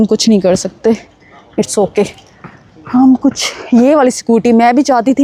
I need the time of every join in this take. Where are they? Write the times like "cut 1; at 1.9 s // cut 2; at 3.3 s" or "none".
none